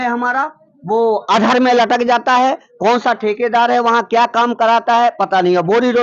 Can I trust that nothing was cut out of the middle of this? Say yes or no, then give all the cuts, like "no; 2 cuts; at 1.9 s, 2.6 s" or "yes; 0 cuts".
yes; 0 cuts